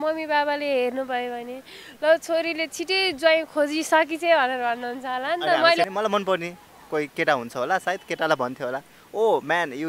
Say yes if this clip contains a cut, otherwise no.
yes